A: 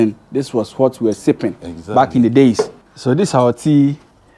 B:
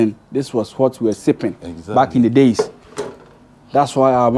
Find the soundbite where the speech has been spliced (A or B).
A